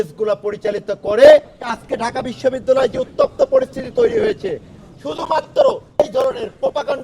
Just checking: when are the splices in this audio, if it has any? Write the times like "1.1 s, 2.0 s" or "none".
1.8 s